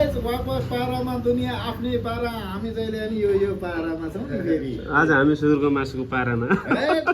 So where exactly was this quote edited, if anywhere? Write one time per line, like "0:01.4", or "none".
none